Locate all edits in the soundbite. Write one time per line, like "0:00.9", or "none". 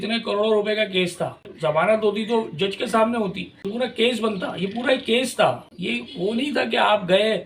0:01.5
0:03.7